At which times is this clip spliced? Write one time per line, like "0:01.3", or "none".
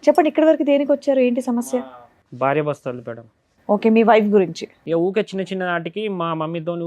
0:04.7